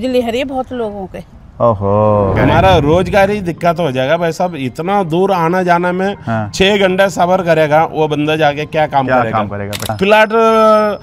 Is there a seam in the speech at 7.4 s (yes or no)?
no